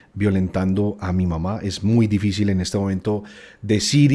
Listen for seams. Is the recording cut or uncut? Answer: uncut